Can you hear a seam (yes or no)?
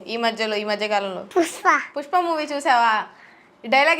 yes